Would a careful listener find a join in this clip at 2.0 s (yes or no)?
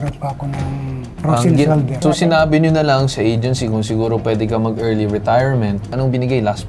yes